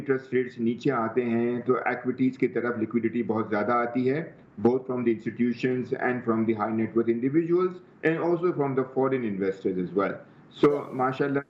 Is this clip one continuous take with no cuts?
yes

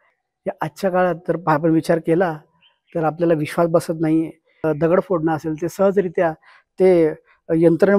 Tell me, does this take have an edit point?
yes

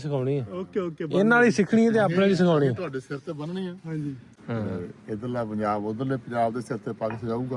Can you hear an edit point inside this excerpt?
yes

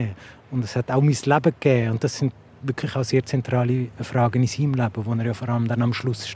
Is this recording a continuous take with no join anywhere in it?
yes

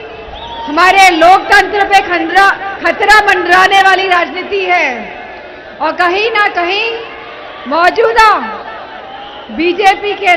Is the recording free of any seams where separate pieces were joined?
yes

